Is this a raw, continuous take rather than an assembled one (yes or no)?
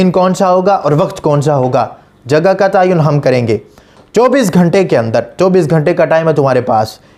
yes